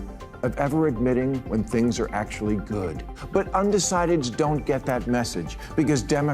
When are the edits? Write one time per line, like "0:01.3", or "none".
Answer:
0:03.1

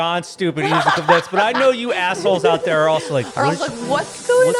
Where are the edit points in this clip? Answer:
none

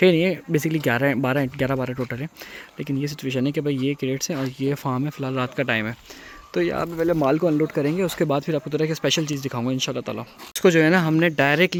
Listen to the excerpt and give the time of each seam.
none

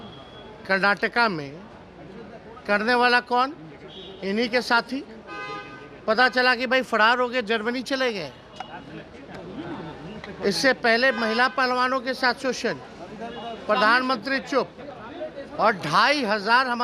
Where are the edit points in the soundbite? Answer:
none

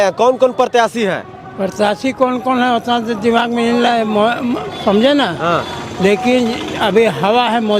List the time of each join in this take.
none

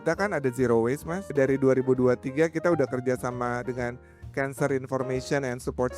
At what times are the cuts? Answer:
0:01.3

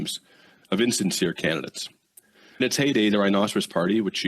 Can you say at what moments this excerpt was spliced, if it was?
0:02.6

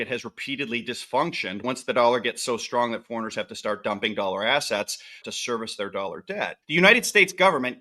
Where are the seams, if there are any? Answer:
0:01.6
0:05.3
0:06.6

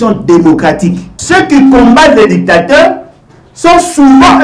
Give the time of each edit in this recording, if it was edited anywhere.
0:01.1

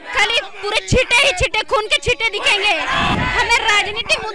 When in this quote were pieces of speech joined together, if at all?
0:03.1

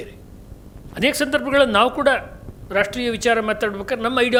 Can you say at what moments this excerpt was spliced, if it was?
none

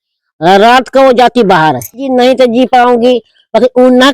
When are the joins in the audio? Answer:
0:02.1

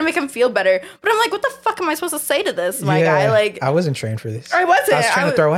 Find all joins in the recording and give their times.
none

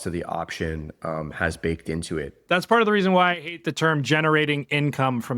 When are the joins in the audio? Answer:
0:02.4

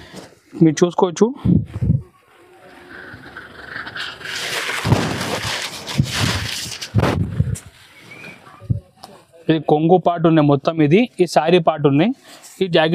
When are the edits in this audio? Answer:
none

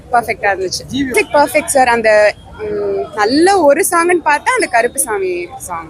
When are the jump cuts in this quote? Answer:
0:01.1

